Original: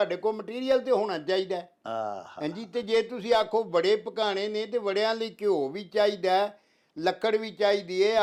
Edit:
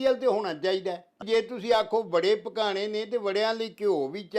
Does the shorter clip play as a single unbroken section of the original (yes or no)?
no